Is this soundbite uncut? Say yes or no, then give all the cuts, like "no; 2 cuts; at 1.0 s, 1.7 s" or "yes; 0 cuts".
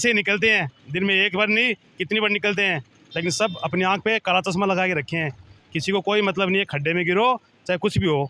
yes; 0 cuts